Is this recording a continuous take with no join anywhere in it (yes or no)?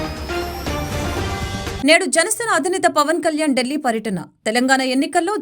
no